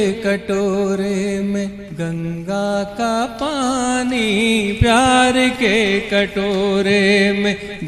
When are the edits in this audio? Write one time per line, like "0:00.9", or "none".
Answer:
none